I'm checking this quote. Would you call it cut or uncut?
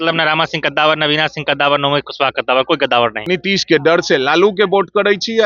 cut